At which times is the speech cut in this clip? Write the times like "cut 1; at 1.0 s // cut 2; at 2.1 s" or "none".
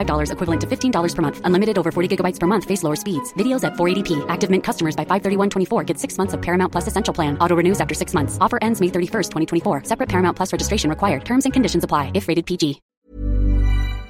cut 1; at 13.0 s